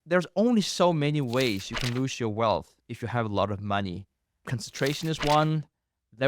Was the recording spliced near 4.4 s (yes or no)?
yes